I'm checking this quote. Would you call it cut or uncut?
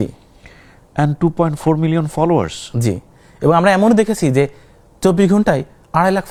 uncut